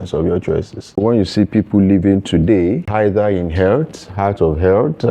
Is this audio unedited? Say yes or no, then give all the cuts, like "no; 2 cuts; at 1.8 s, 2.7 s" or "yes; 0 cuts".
no; 2 cuts; at 1.0 s, 2.9 s